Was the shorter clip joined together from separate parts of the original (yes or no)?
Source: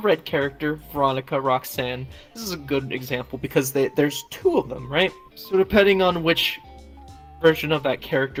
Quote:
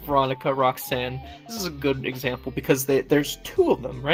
no